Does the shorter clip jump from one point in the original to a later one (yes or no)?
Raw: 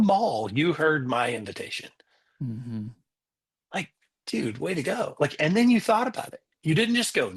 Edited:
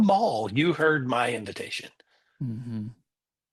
no